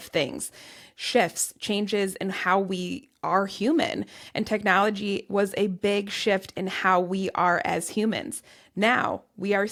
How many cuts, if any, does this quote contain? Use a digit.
0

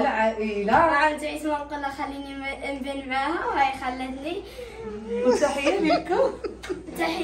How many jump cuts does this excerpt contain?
0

